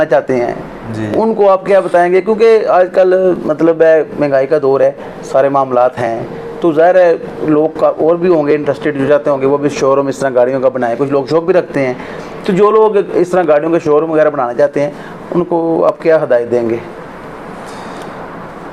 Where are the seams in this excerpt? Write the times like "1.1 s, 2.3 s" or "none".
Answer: none

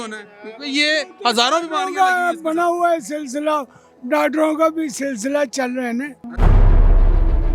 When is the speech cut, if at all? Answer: none

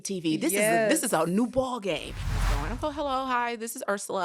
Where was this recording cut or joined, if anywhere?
2.5 s

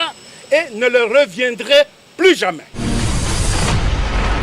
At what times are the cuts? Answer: 2.7 s

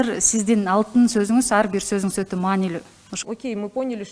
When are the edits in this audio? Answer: 3.1 s

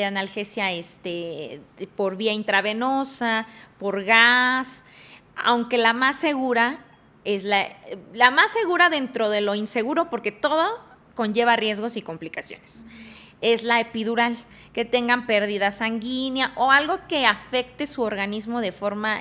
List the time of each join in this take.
14.5 s

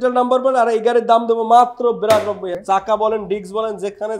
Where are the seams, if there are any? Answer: 2.5 s

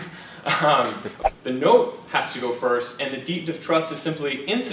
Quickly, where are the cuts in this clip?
1.1 s

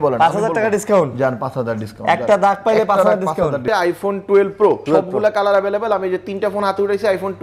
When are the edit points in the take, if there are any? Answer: 3.6 s, 4.8 s

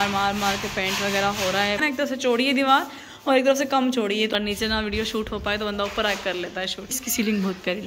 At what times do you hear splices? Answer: 1.8 s, 4.3 s, 6.9 s

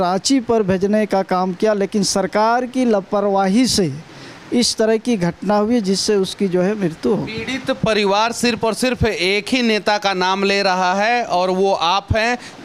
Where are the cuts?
none

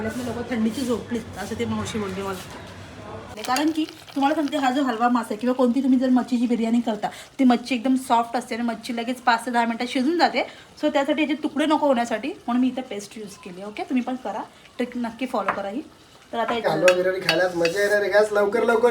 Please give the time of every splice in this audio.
3.3 s, 16.6 s

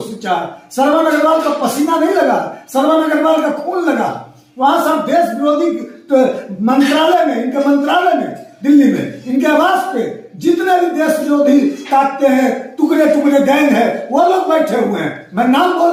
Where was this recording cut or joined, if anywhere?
none

